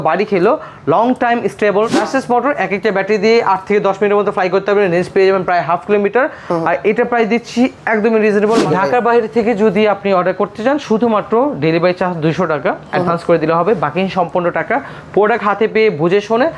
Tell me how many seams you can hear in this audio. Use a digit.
2